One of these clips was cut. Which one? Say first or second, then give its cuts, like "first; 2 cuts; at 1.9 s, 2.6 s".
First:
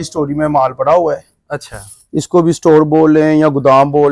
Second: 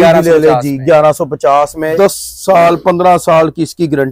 second; 1 cut; at 1.8 s